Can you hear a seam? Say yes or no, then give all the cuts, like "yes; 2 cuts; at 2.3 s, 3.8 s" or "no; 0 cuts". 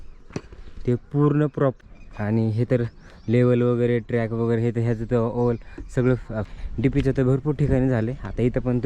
yes; 2 cuts; at 1.8 s, 6.4 s